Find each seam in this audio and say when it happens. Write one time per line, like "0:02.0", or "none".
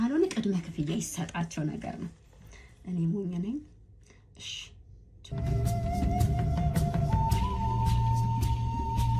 0:05.1